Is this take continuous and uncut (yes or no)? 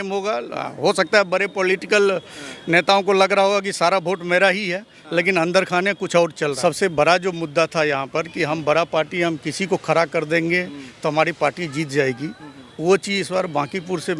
no